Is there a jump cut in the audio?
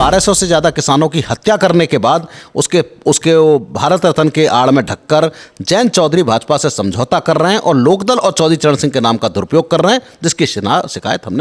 no; 0 cuts

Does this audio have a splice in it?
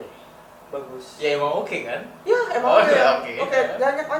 no; 0 cuts

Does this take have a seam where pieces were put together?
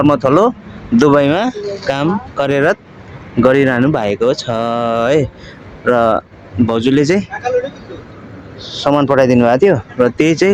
no; 0 cuts

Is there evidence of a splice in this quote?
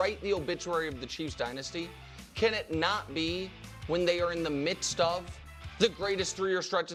no; 0 cuts

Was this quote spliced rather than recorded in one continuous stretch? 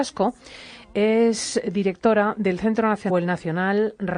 no; 0 cuts

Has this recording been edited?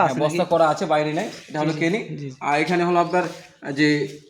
no; 0 cuts

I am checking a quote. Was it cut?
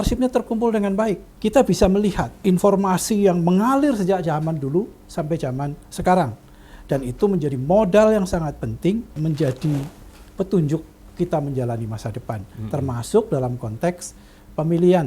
yes; 3 cuts; at 1.3 s, 2.5 s, 9.1 s

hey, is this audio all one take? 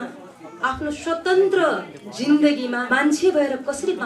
no; 1 cut; at 2.8 s

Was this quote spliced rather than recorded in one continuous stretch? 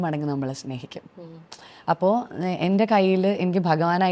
no; 0 cuts

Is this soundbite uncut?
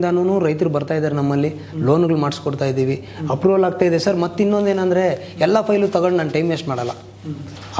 yes; 0 cuts

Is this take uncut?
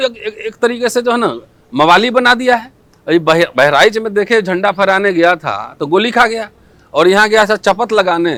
yes; 0 cuts

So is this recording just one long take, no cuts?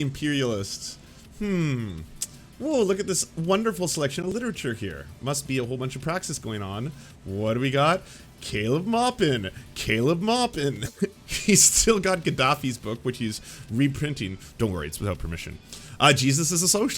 no; 1 cut; at 11.2 s

